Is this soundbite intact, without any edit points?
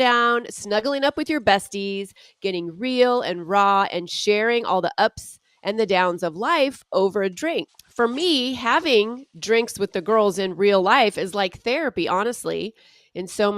no; 1 cut; at 7.8 s

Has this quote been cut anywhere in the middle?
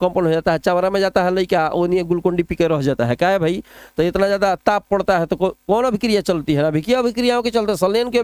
no; 0 cuts

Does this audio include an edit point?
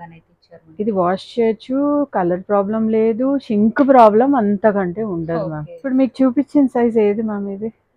yes; 1 cut; at 5.7 s

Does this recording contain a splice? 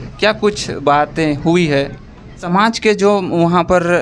yes; 1 cut; at 2.4 s

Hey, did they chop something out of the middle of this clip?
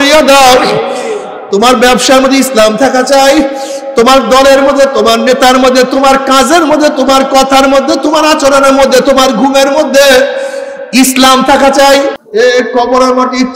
yes; 1 cut; at 12.2 s

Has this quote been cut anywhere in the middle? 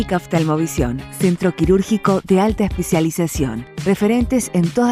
no; 0 cuts

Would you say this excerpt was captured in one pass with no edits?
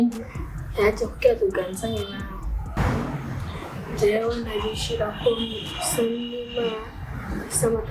no; 1 cut; at 2.6 s

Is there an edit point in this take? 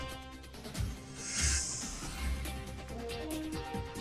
yes; 1 cut; at 2.2 s

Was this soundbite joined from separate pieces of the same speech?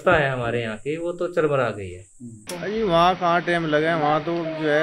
yes; 1 cut; at 2.4 s

